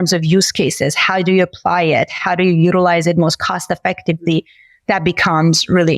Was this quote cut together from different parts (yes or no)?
no